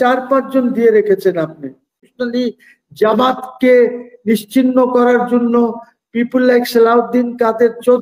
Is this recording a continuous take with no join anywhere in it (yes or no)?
no